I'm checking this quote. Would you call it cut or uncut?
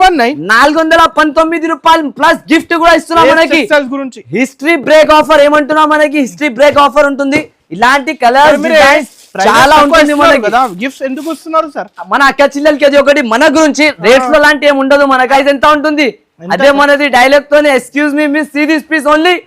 cut